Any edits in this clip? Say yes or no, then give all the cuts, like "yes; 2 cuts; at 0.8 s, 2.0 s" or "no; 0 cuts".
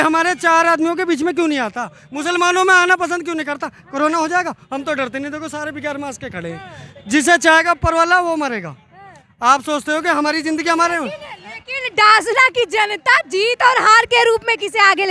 no; 0 cuts